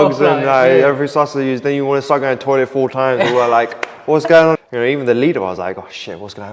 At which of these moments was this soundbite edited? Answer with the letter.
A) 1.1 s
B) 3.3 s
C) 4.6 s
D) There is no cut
C